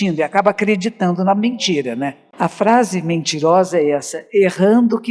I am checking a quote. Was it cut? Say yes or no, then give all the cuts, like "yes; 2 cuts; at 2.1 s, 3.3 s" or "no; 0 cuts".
yes; 1 cut; at 2.2 s